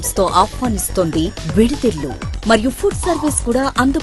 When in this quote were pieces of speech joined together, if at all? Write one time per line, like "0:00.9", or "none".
none

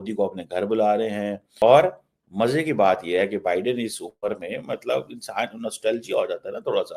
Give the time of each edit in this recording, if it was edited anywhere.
none

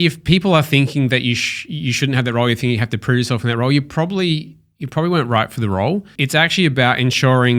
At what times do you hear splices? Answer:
0:06.2

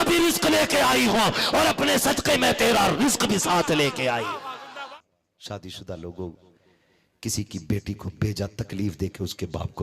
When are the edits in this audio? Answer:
0:04.9

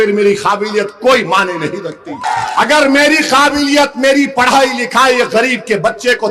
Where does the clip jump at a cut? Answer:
0:02.2

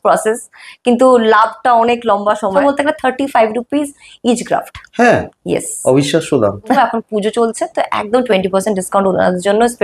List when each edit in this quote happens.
0:02.6
0:06.8

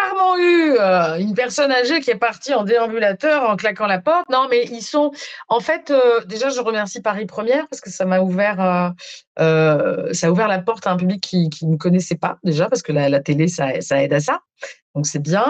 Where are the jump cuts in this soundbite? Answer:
none

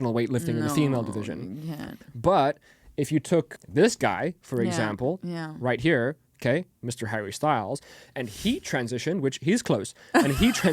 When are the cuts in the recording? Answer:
0:03.6

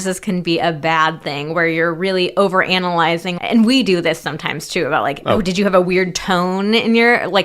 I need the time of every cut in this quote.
0:03.3

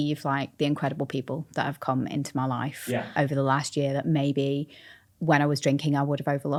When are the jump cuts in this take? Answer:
none

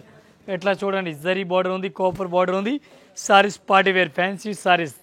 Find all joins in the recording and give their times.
none

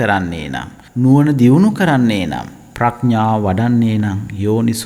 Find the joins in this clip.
none

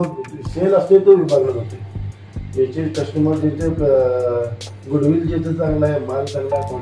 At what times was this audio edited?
none

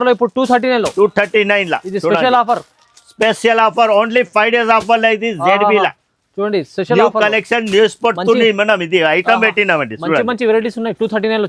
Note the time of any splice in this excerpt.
none

